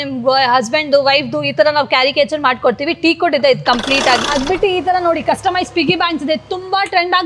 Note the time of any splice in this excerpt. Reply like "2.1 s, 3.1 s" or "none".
4.2 s